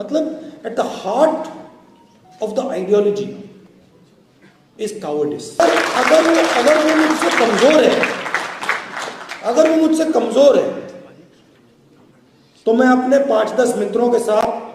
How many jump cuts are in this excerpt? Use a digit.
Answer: 1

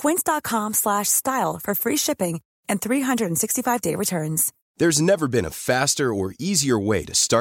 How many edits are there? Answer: 1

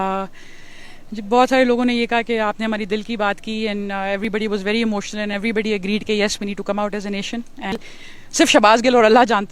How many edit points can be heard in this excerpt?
1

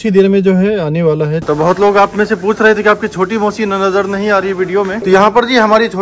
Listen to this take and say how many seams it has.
2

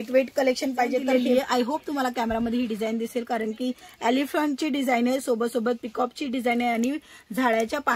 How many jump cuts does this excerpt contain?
1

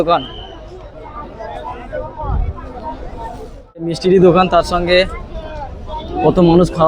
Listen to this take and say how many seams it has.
1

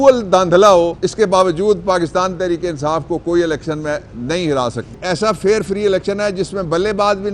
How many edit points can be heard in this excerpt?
2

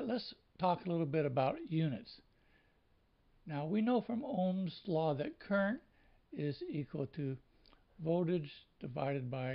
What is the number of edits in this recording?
1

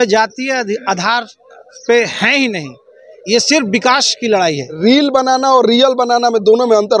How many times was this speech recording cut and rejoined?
1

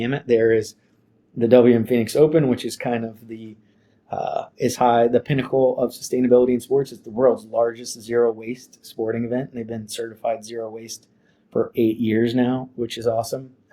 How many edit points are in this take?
0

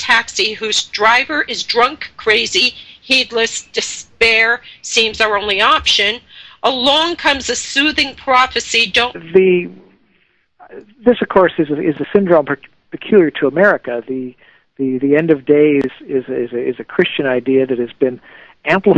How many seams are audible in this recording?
0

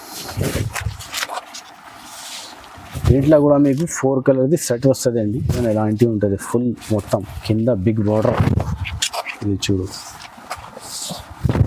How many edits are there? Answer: 1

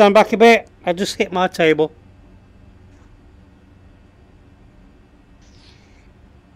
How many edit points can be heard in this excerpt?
0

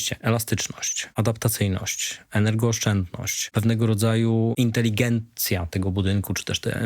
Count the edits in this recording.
3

